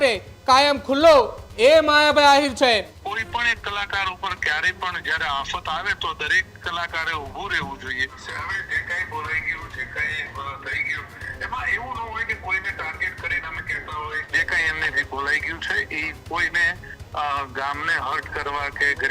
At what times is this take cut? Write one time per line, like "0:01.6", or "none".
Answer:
0:03.0
0:08.2
0:14.3